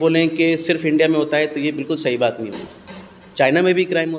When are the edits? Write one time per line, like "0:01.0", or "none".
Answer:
none